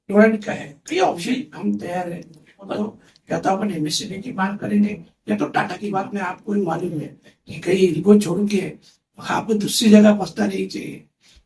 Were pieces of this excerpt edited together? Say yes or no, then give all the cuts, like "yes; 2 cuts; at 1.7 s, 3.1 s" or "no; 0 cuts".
yes; 3 cuts; at 1.4 s, 2.8 s, 5.8 s